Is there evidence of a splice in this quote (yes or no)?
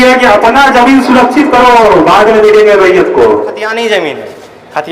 yes